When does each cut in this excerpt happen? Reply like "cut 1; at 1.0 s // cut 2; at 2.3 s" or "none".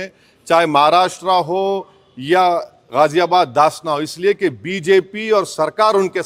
none

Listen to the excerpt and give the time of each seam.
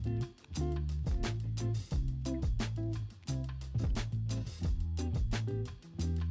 cut 1; at 1.1 s

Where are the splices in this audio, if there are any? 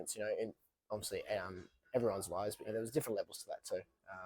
cut 1; at 2.7 s

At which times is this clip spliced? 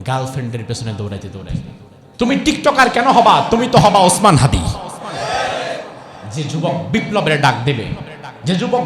cut 1; at 2.0 s

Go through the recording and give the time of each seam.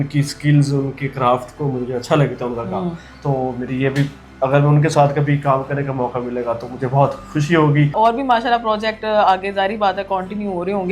cut 1; at 7.9 s

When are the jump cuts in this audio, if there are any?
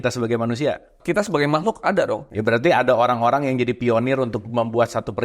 cut 1; at 1.0 s // cut 2; at 2.3 s

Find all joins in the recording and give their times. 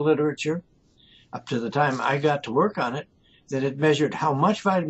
none

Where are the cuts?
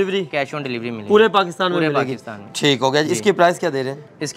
none

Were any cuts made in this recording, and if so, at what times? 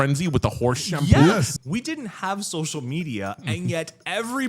cut 1; at 1.5 s

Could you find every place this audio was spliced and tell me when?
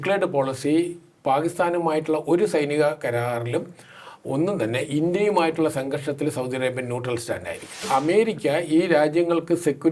cut 1; at 7.8 s

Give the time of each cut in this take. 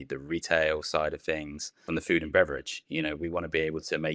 cut 1; at 1.9 s

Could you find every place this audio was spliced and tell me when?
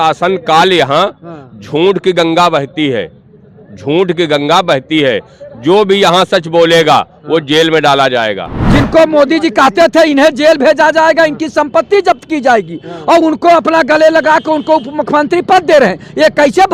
cut 1; at 8.6 s

